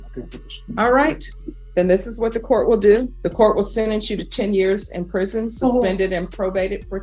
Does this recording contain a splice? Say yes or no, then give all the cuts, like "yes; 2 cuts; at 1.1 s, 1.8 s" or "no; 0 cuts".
yes; 1 cut; at 3.2 s